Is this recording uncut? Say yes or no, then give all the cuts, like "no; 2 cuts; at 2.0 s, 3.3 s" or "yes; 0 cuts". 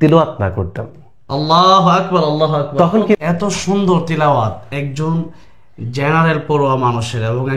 no; 1 cut; at 3.2 s